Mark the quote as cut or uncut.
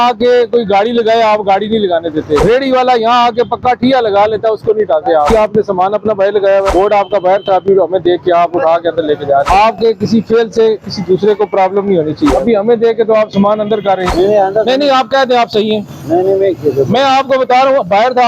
cut